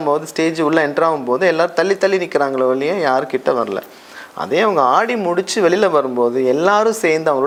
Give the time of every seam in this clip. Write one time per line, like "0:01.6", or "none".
none